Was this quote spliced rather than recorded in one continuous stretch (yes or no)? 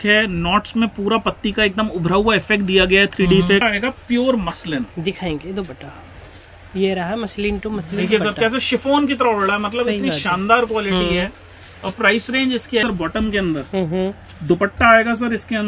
yes